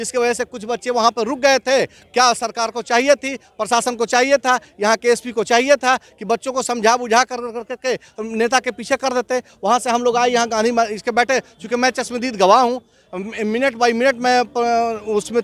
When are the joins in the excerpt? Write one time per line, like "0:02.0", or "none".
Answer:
none